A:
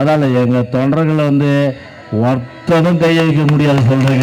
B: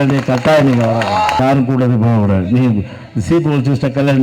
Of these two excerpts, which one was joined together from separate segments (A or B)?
B